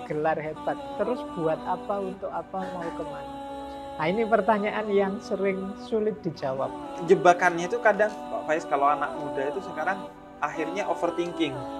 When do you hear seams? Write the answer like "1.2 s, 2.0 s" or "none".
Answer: 6.9 s